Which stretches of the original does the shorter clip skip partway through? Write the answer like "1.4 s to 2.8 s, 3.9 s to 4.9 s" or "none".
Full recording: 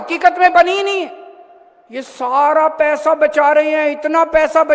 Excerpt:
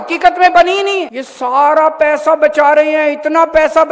1.2 s to 2.0 s